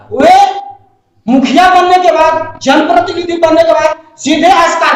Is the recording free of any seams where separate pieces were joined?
yes; 0 cuts

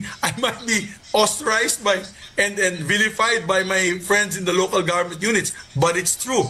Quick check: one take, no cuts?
yes; 0 cuts

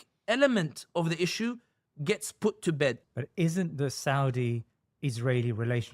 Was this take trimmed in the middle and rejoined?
yes; 1 cut; at 3.0 s

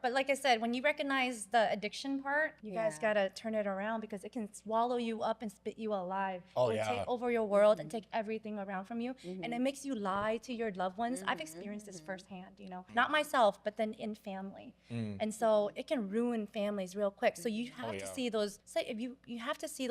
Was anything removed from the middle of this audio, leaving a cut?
yes; 3 cuts; at 2.6 s, 12.9 s, 18.6 s

